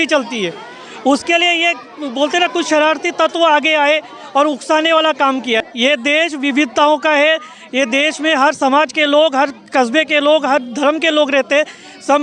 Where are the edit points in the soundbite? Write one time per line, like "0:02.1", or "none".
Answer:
0:05.7